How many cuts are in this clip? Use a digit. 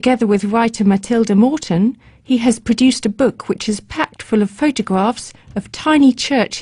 1